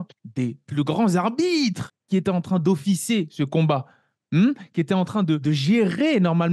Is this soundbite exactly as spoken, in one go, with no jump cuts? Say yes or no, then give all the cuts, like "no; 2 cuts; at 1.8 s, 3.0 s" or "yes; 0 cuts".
no; 2 cuts; at 1.9 s, 5.4 s